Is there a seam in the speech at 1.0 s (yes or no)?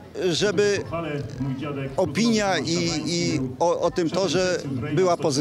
no